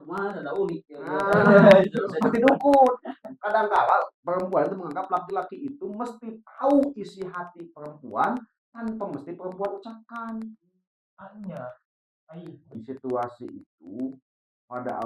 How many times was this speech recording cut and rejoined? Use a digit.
1